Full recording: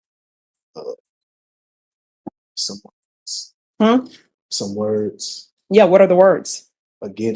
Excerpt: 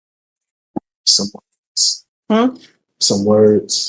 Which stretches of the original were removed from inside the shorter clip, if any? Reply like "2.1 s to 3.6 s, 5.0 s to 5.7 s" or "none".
none